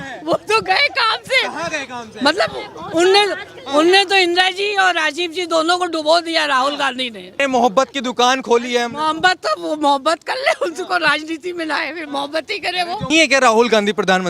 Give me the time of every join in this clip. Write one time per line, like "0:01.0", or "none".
0:07.4
0:13.1